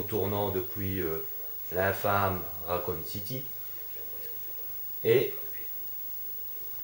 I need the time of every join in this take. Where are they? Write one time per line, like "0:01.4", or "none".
none